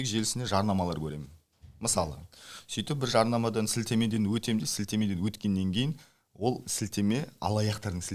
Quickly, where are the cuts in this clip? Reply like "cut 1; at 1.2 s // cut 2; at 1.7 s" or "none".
none